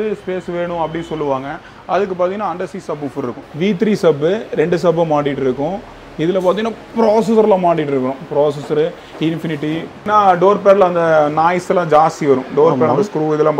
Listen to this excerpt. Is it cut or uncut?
cut